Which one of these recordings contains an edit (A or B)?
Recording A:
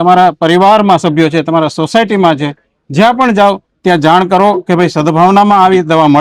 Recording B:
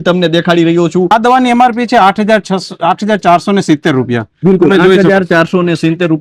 B